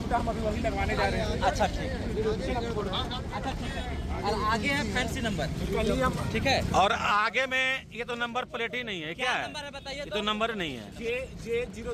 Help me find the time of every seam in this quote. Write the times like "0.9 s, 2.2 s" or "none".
none

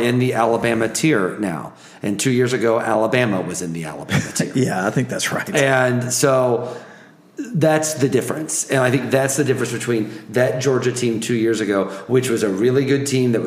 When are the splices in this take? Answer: none

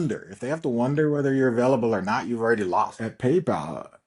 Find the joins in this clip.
3.0 s

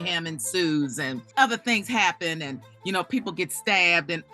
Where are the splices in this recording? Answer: 1.1 s

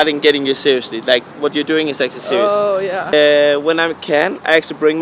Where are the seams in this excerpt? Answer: 3.1 s

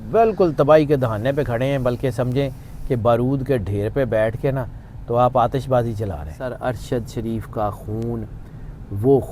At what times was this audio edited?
6.4 s

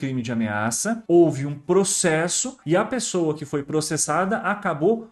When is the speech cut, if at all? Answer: 1.0 s, 2.5 s

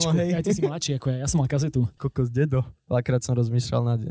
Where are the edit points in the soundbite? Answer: 1.9 s, 2.8 s

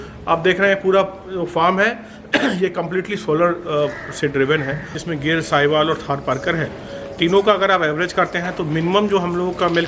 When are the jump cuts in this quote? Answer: 4.9 s

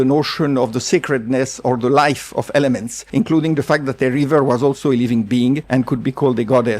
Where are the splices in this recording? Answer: 2.9 s, 5.6 s

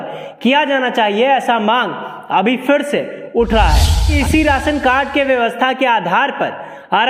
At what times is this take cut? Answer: 4.1 s

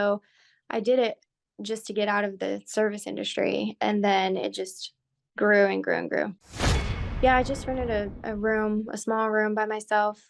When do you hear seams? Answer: 6.5 s

